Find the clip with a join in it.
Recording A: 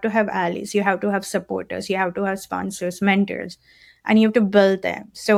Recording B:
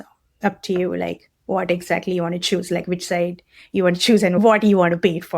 B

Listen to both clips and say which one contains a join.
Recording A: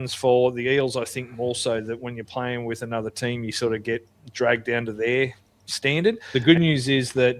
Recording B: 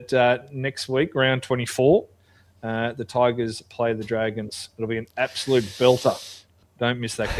A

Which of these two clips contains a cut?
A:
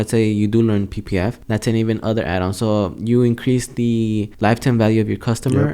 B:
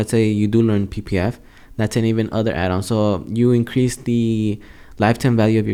A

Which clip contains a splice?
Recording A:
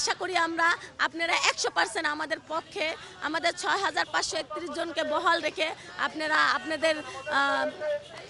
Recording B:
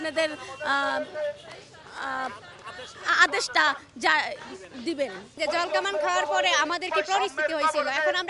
B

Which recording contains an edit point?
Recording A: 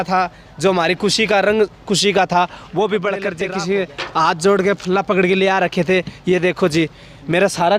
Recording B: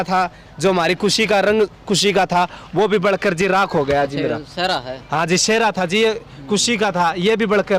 A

